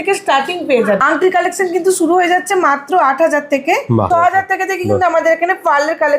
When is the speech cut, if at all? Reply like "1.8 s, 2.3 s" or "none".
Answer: 1.0 s, 4.1 s